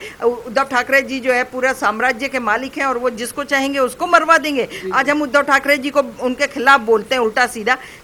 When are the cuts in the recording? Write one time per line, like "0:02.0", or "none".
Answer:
none